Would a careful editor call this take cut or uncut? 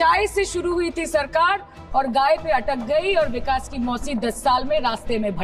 uncut